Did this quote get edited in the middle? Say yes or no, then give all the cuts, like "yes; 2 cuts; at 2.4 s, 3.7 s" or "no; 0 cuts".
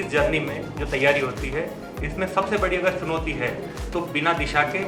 no; 0 cuts